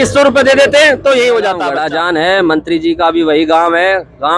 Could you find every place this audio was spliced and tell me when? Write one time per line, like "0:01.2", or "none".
0:01.7